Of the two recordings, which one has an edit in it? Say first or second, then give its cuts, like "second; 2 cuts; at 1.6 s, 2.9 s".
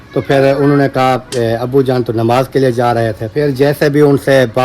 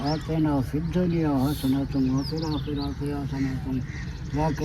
first; 1 cut; at 3.3 s